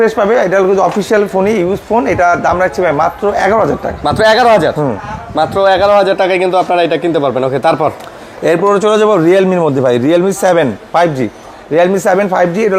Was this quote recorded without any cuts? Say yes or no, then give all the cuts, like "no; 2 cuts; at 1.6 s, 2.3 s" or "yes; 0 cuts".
yes; 0 cuts